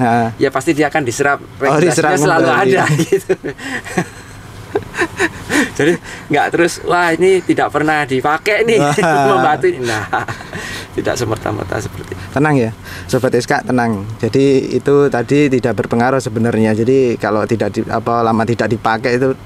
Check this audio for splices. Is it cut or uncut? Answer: uncut